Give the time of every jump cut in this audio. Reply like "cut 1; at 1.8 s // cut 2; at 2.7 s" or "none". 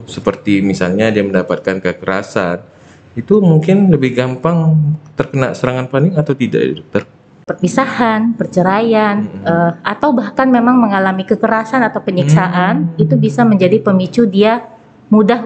cut 1; at 7.5 s

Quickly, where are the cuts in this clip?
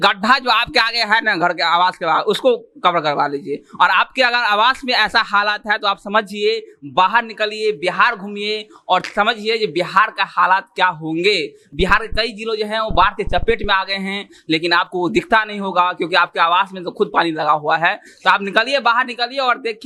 none

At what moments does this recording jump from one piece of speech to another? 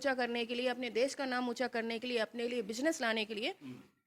none

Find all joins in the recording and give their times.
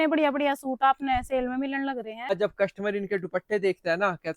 cut 1; at 2.3 s

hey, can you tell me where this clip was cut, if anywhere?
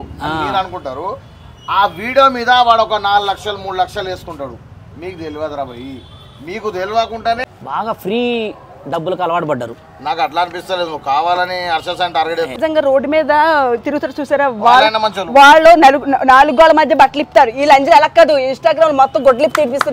cut 1; at 7.4 s // cut 2; at 12.5 s

